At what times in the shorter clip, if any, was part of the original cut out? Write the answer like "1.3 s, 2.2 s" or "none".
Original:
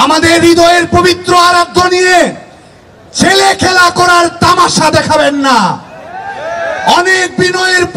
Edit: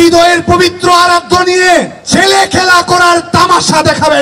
2.0 s